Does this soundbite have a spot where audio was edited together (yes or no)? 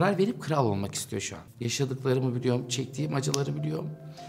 yes